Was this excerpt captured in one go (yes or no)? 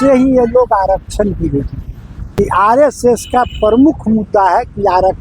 no